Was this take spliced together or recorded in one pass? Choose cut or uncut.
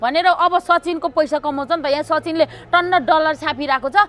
uncut